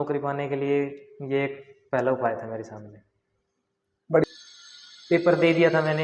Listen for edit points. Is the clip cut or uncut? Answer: cut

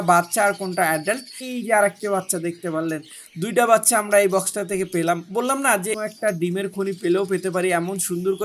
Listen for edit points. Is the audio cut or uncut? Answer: cut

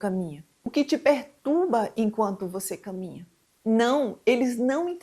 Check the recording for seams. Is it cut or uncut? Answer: cut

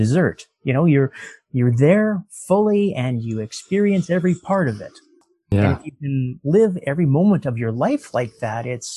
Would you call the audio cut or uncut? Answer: cut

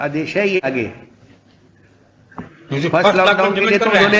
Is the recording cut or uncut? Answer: uncut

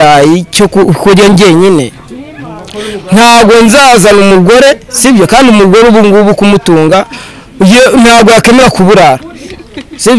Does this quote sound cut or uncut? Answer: uncut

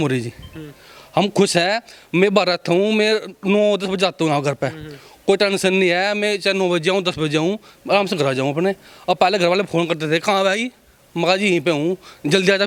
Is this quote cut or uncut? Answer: uncut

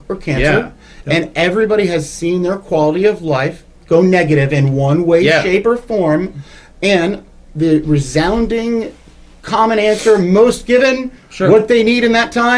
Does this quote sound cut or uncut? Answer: uncut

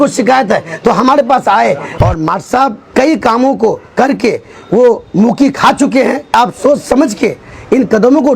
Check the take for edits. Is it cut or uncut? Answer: cut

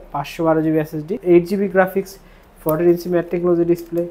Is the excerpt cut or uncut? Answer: cut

